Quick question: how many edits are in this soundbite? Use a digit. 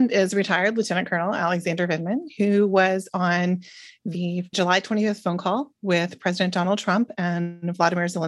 0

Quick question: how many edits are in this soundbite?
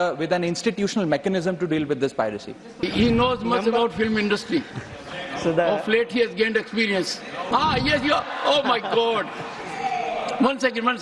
2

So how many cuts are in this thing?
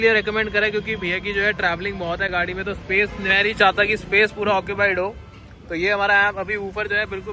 0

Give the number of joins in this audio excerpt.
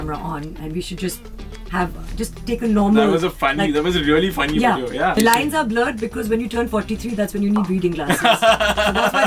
1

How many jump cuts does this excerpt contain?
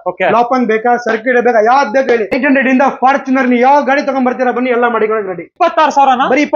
2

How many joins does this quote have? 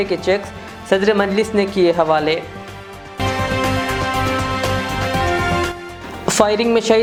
0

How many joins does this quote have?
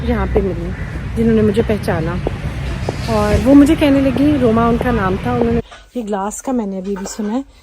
1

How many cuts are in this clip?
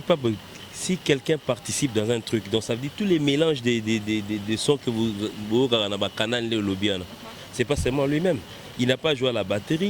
0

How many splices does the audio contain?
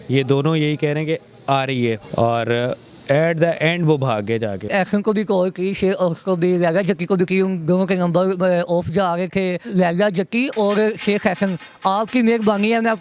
3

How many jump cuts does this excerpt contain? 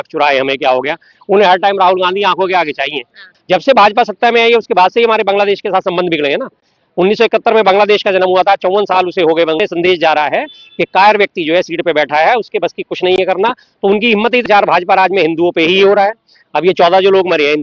3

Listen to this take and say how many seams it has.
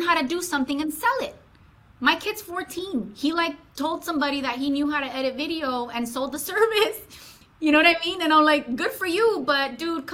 0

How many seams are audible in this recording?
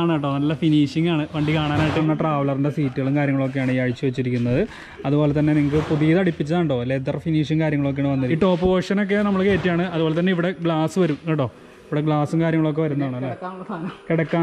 2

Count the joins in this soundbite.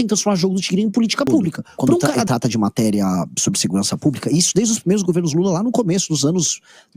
1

